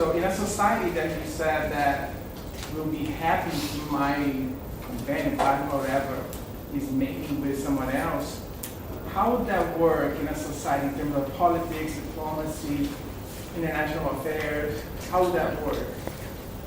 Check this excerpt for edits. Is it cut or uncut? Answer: cut